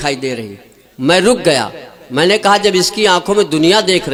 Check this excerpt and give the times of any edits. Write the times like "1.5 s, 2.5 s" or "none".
none